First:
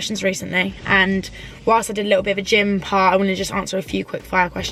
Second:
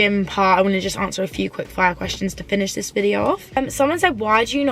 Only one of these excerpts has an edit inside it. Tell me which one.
second; 1 cut; at 3.4 s

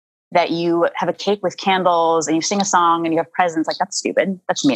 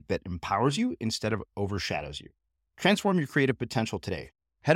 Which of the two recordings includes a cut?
first; 1 cut; at 1.2 s

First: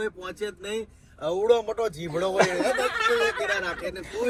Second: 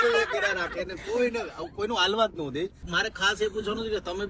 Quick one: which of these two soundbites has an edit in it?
second; 1 cut; at 2.9 s

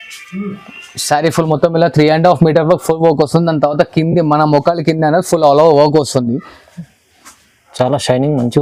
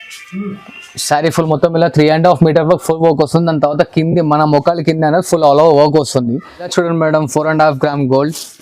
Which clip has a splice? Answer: second; 1 cut; at 6.7 s

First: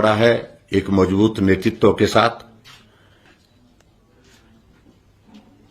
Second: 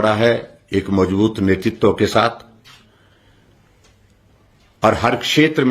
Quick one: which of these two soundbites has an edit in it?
first; 1 cut; at 3.3 s

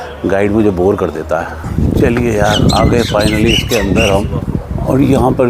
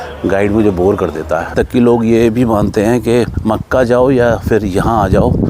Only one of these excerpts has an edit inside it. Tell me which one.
second; 1 cut; at 1.5 s

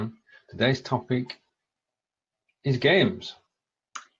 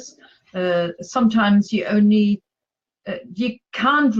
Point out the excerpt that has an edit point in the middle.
second; 1 cut; at 1.9 s

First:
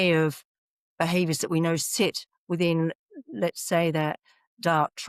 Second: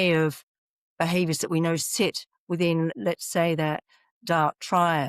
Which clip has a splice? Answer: second; 1 cut; at 3.0 s

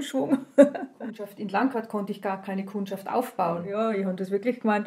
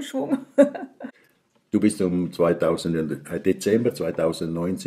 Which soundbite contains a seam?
first; 2 cuts; at 1.3 s, 3.7 s

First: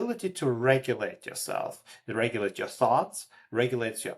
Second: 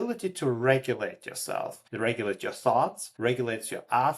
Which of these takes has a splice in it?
second; 2 cuts; at 1.8 s, 3.0 s

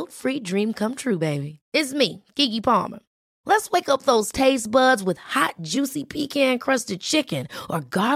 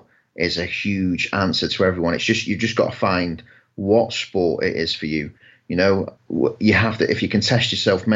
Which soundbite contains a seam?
second; 1 cut; at 6.2 s

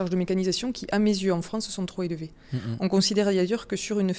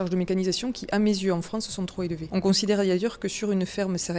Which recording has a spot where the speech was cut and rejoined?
second; 1 cut; at 2.2 s

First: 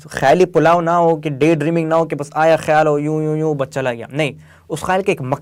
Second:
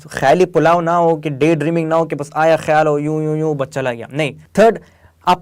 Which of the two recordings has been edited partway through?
second; 1 cut; at 4.4 s

